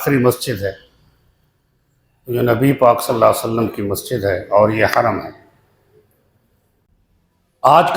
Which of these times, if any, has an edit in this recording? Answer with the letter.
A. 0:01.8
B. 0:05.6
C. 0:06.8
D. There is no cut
C